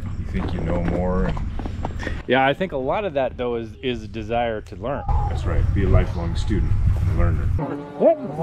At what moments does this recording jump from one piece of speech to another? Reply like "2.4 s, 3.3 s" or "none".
7.5 s